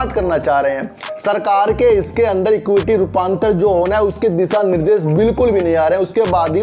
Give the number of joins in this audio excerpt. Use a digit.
0